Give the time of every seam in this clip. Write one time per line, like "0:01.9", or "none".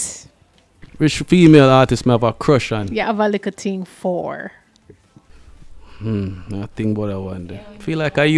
0:07.5